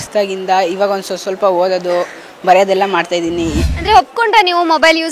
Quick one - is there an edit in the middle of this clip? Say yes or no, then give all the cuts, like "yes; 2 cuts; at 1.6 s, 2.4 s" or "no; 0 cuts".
yes; 1 cut; at 3.6 s